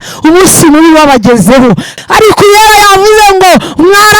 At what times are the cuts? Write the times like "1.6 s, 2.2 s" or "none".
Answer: 2.0 s